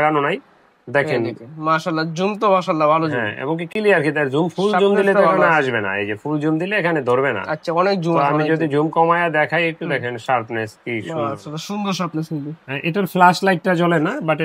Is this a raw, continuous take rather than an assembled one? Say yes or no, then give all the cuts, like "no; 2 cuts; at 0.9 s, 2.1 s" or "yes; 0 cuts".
yes; 0 cuts